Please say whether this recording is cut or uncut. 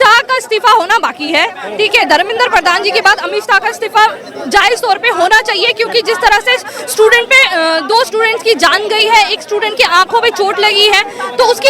uncut